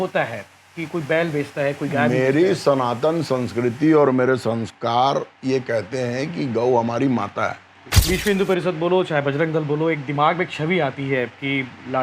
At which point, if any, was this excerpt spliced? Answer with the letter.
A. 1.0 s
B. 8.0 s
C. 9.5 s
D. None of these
B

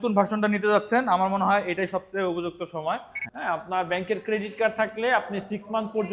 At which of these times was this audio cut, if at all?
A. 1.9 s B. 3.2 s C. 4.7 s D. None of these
B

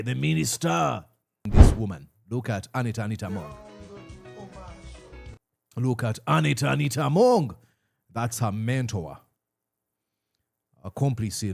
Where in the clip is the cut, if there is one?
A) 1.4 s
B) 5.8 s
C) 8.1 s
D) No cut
A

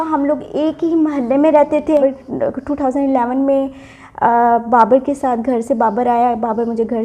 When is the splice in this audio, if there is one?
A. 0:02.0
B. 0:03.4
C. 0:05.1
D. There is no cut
A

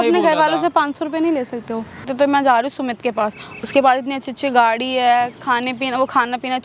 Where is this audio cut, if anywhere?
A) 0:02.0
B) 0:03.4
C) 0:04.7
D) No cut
A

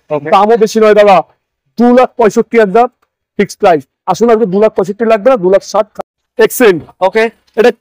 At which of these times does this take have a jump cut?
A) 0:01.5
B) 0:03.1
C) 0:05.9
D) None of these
C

